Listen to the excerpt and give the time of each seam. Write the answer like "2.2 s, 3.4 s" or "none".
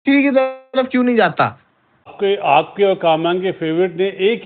2.1 s

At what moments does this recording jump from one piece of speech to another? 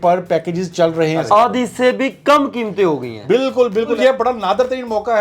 1.2 s, 4.0 s

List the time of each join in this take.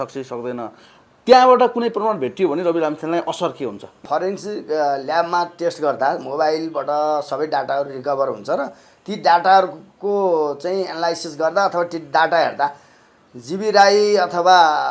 4.0 s

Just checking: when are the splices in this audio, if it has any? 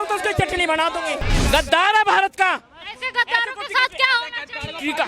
1.3 s

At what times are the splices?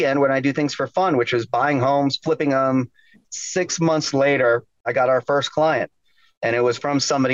3.2 s, 4.9 s

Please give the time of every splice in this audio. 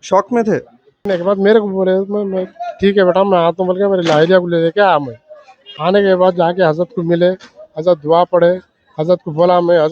1.0 s

